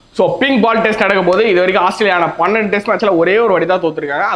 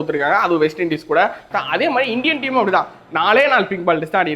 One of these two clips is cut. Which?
second; 1 cut; at 1.5 s

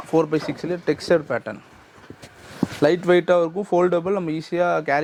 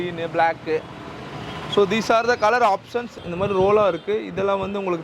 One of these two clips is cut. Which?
second; 1 cut; at 2.9 s

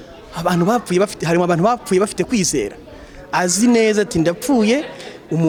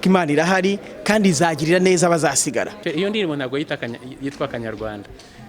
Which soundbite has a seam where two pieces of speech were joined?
second; 1 cut; at 2.8 s

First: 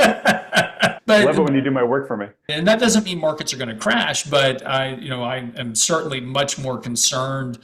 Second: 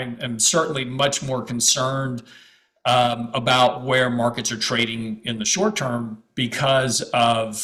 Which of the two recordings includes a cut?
first; 2 cuts; at 1.0 s, 2.5 s

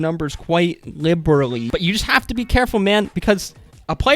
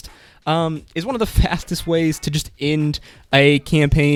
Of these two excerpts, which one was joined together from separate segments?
first; 1 cut; at 1.7 s

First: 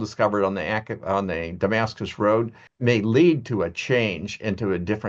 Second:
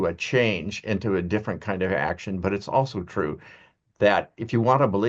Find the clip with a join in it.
first; 1 cut; at 2.6 s

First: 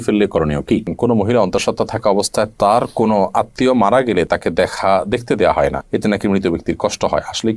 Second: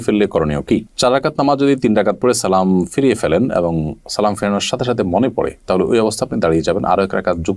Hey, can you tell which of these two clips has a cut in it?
first; 1 cut; at 0.9 s

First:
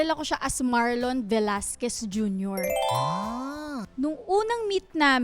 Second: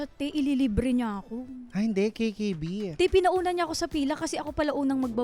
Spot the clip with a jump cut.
first; 1 cut; at 3.8 s

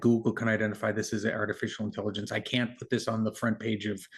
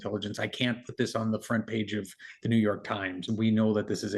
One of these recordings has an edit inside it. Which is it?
second; 1 cut; at 3.2 s

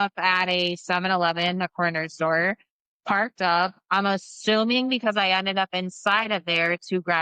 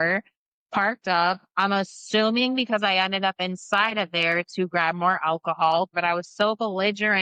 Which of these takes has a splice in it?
second; 1 cut; at 5.9 s

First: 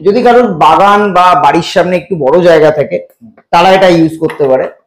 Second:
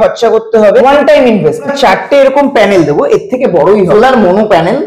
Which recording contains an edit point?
second; 3 cuts; at 0.8 s, 1.7 s, 3.9 s

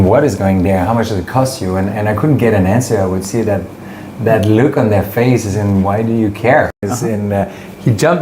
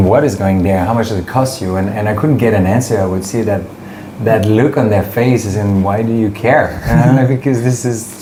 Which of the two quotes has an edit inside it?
first; 1 cut; at 6.8 s

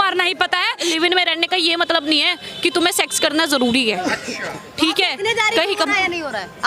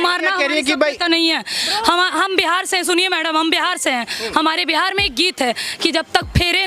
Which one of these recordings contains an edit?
first; 2 cuts; at 0.8 s, 4.6 s

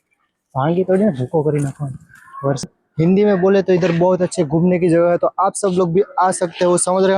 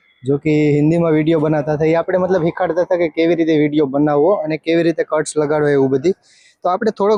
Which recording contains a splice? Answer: first; 1 cut; at 2.6 s

